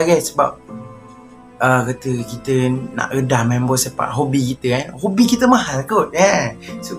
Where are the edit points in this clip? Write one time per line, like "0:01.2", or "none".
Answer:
none